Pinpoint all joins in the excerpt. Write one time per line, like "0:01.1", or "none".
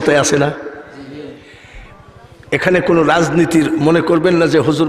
none